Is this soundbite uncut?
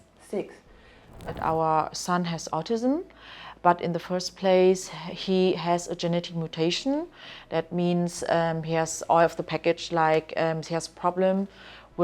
no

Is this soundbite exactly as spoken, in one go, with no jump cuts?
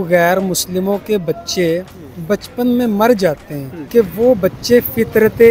no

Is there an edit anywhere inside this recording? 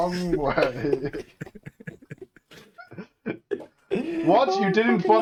no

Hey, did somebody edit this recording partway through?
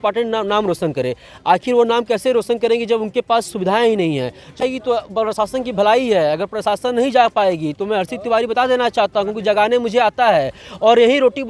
yes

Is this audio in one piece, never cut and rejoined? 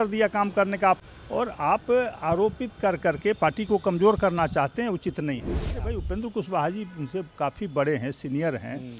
no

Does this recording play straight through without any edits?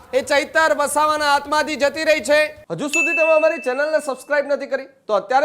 no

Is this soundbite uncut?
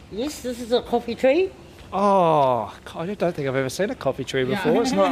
yes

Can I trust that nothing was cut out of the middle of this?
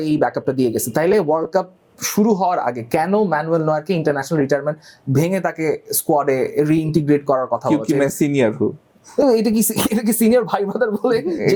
yes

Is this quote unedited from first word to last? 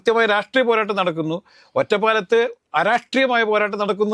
yes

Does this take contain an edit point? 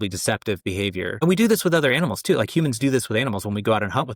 no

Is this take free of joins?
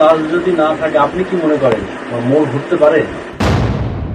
no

